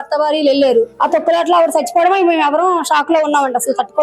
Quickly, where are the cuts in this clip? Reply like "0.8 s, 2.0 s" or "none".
0.9 s